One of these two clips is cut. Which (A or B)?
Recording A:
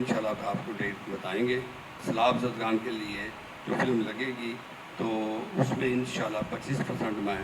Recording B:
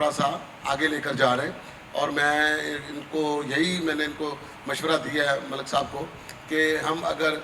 A